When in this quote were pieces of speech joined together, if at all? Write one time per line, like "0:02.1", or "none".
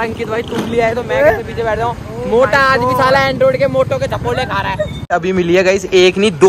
0:05.0